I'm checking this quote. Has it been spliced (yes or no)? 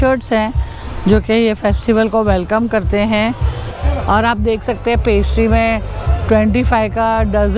yes